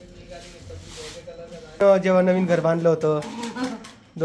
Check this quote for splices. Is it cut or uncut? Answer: cut